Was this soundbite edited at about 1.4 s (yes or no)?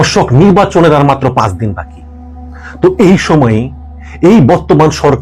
no